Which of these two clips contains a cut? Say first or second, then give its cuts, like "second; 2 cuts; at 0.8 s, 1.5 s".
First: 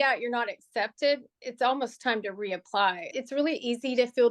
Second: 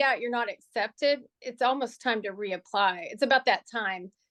first; 1 cut; at 3.1 s